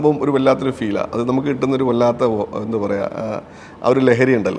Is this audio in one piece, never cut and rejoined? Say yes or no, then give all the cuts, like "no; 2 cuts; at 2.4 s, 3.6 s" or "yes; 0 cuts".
yes; 0 cuts